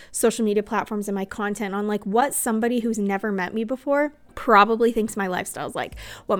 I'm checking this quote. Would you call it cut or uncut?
cut